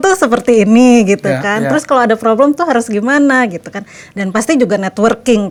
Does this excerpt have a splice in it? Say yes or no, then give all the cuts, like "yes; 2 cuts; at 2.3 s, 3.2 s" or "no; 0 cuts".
no; 0 cuts